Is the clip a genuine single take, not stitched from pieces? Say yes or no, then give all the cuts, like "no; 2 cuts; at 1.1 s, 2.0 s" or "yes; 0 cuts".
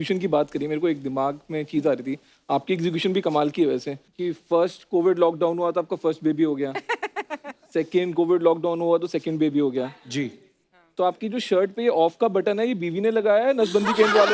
yes; 0 cuts